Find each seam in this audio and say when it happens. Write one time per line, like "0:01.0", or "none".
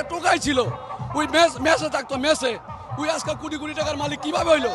none

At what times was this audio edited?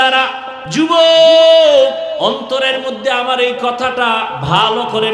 0:00.8
0:02.2

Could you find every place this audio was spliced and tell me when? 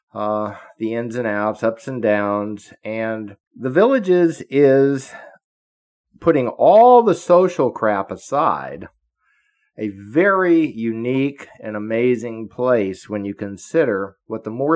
0:03.4

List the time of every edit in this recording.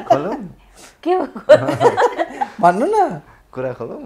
none

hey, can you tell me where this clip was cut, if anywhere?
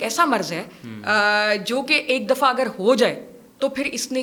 none

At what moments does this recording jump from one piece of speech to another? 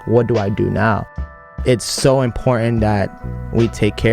0:01.4

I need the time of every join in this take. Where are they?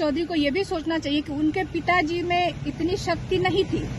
none

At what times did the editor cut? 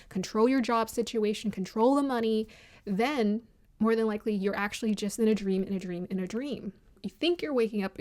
0:07.1

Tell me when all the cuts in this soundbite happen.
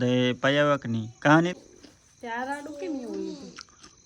0:01.7

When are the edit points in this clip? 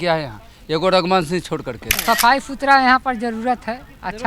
0:01.9

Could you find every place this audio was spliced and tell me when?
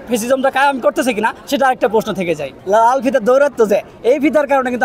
0:02.6

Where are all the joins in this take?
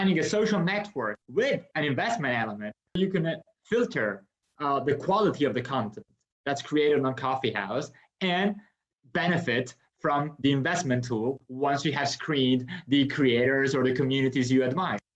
0:01.2
0:03.0

